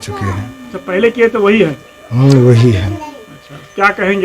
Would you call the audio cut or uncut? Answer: uncut